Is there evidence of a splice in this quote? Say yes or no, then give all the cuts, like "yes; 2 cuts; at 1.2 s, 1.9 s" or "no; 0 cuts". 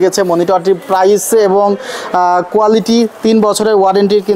no; 0 cuts